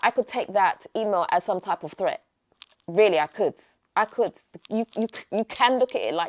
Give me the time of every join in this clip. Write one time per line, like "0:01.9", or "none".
none